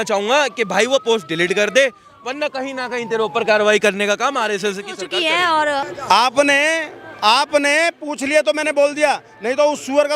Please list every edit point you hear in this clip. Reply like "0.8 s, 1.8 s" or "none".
5.8 s